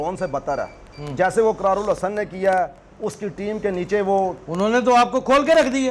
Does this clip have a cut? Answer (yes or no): no